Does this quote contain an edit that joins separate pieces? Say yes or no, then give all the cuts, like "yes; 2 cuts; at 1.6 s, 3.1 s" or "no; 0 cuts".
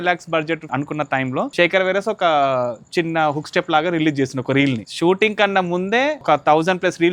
yes; 3 cuts; at 1.2 s, 4.9 s, 6.2 s